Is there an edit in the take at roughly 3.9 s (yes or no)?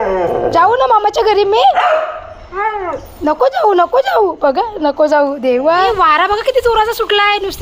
no